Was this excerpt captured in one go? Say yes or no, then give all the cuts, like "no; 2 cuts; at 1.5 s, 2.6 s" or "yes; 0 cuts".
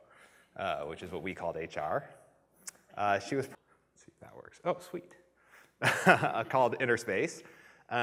yes; 0 cuts